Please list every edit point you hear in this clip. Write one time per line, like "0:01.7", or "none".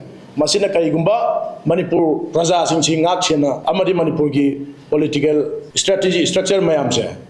0:03.6
0:05.7